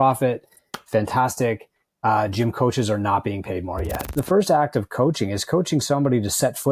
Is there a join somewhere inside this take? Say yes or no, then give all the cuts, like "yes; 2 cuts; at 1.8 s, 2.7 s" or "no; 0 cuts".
yes; 1 cut; at 4.1 s